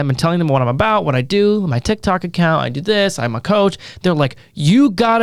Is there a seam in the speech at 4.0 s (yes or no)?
no